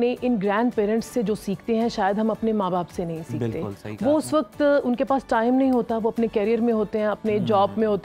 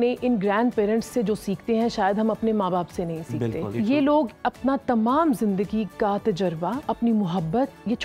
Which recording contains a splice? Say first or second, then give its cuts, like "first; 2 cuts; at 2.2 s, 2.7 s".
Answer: second; 2 cuts; at 3.7 s, 6.8 s